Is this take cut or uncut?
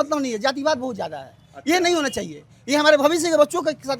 uncut